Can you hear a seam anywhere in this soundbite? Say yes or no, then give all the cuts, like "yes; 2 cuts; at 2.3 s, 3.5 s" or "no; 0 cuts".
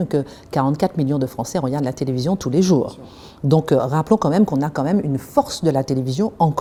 no; 0 cuts